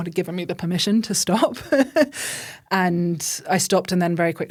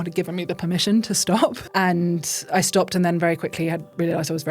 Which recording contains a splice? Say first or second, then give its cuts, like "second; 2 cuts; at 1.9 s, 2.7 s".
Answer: second; 1 cut; at 1.6 s